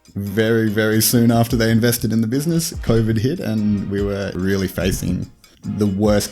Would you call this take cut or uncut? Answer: cut